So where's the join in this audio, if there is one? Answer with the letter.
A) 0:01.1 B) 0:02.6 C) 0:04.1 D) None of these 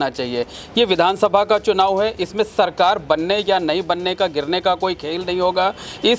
D